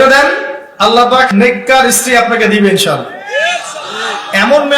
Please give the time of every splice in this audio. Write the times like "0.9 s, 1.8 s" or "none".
1.3 s